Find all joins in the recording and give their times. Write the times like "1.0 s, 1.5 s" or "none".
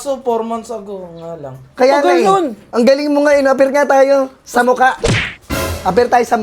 none